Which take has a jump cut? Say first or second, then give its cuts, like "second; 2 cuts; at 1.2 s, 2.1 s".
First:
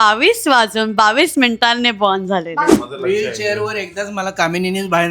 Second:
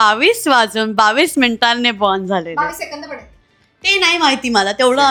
first; 1 cut; at 2.7 s